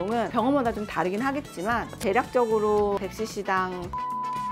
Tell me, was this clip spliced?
no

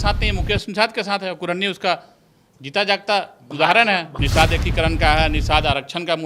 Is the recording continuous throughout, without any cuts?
no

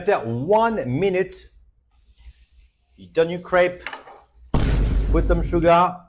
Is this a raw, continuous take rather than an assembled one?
yes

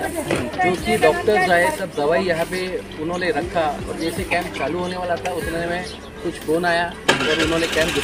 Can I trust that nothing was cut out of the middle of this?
yes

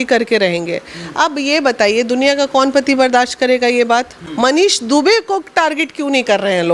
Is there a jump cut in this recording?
yes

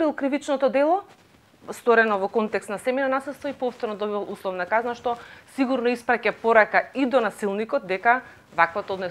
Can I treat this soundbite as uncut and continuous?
yes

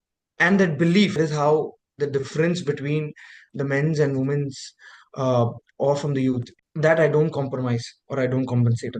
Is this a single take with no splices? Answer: no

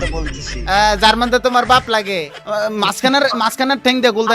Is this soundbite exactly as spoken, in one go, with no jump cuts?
no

